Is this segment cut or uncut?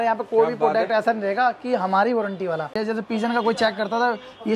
cut